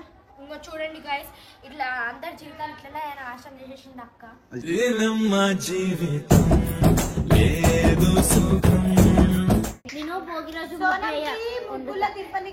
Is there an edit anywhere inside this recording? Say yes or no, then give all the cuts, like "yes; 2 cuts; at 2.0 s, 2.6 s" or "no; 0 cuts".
yes; 1 cut; at 9.8 s